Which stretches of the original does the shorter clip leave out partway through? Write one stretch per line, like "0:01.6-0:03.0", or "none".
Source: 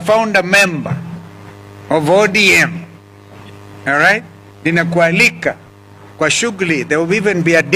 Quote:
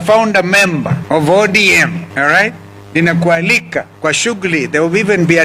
0:01.0-0:01.8
0:02.9-0:03.8
0:05.6-0:06.1